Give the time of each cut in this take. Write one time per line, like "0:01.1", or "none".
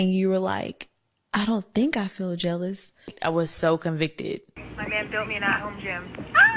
0:03.1
0:04.6

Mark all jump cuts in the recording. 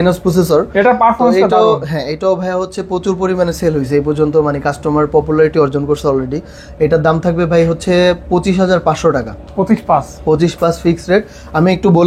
none

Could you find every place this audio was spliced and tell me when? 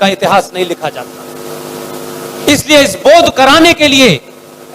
0:01.0

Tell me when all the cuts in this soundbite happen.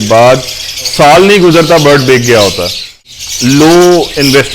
0:03.0

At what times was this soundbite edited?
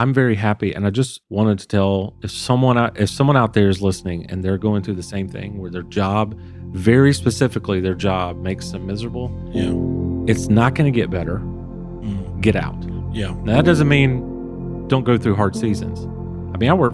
0:01.2

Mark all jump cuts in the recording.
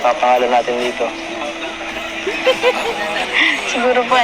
0:03.3

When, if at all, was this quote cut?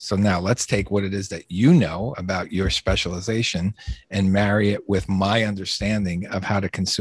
none

